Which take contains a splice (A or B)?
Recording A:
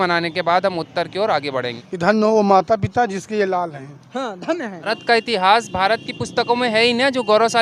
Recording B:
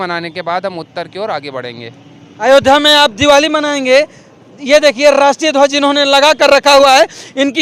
A